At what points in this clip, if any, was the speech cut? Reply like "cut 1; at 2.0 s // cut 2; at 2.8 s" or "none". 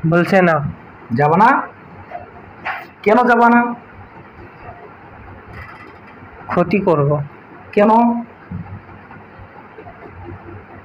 none